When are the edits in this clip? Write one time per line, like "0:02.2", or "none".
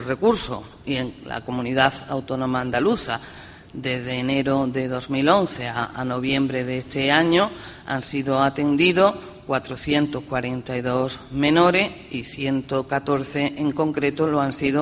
0:07.4